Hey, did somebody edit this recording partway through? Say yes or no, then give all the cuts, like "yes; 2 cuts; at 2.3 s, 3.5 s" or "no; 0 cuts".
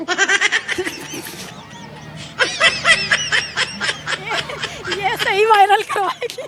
no; 0 cuts